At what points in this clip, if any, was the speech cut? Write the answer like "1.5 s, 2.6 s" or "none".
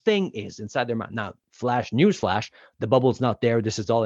1.4 s